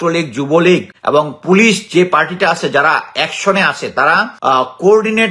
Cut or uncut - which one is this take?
cut